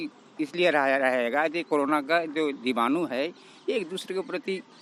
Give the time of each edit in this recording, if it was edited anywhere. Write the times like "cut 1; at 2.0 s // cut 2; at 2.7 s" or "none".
none